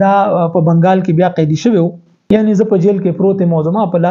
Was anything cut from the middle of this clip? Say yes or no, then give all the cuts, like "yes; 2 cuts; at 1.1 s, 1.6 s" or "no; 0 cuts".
yes; 1 cut; at 2.1 s